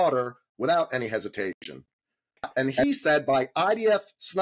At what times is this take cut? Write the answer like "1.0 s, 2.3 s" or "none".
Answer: 2.5 s